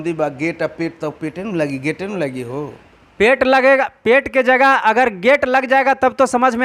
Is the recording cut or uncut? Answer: uncut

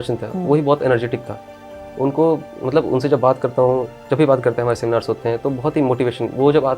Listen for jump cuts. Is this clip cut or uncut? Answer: uncut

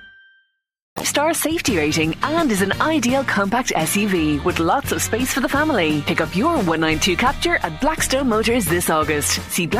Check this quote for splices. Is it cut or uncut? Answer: cut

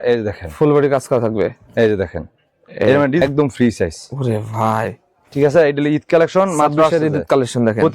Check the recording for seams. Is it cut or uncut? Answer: cut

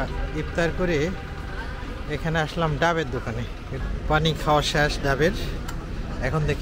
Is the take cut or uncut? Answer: cut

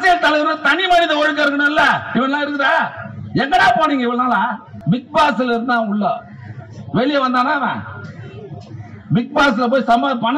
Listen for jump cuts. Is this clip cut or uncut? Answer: cut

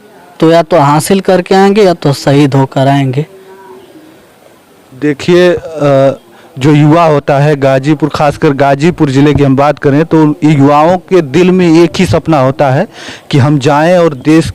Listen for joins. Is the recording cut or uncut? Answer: uncut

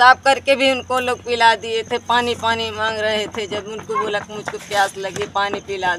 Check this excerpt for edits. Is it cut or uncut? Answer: uncut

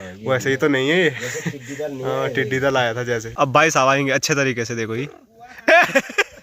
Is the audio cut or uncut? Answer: cut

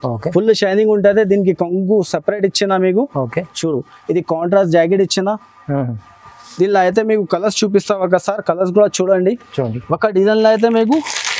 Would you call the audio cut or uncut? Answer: uncut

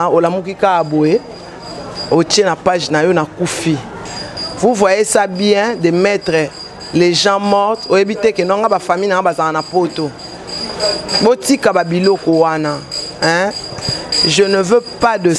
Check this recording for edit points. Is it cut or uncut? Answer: uncut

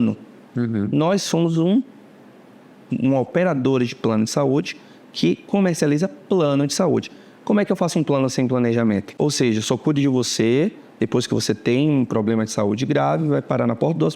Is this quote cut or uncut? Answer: cut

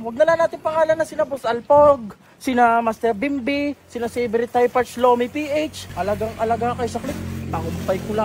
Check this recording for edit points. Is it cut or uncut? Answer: uncut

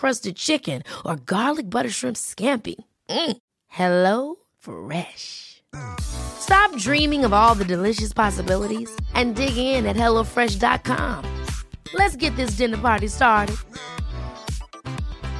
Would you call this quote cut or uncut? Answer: uncut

